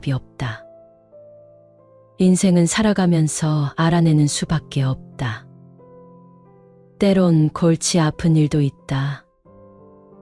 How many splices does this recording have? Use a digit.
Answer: 2